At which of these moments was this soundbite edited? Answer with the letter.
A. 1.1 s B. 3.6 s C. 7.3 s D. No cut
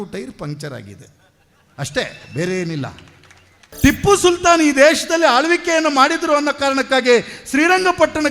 B